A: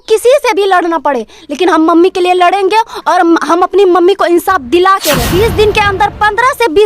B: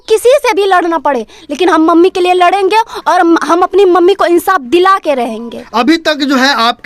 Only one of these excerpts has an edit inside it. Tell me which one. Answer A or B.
A